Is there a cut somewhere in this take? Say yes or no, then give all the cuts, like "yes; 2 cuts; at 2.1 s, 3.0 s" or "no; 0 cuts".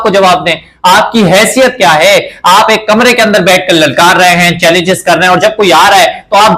no; 0 cuts